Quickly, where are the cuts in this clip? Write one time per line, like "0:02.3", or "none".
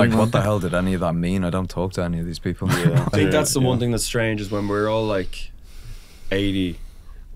0:03.1